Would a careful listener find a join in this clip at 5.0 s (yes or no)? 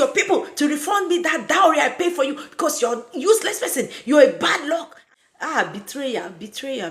yes